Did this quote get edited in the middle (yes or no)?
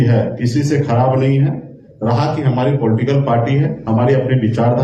no